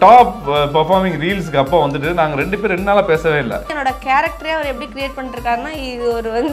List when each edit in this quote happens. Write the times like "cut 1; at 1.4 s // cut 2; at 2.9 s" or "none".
cut 1; at 3.7 s